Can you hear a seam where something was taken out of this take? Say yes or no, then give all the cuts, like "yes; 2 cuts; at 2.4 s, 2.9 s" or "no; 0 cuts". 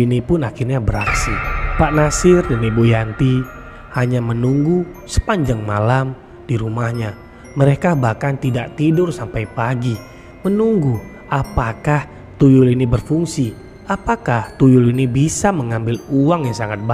no; 0 cuts